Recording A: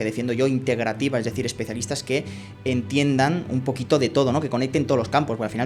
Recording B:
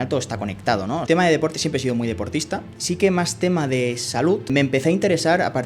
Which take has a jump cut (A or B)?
B